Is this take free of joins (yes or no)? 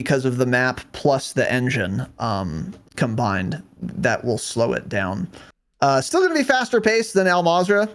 yes